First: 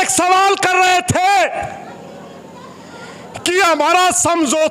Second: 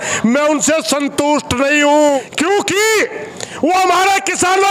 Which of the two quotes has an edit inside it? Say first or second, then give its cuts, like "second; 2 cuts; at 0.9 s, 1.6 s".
second; 1 cut; at 2.2 s